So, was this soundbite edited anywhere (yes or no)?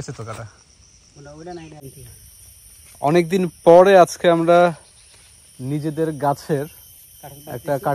no